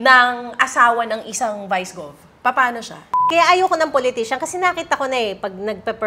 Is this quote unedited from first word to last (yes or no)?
no